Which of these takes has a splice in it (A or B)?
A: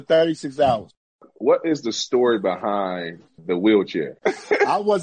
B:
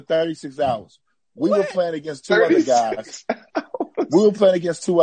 A